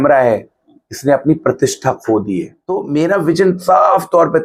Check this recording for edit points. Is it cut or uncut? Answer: cut